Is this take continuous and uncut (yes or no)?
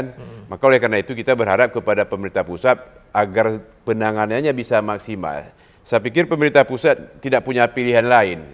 yes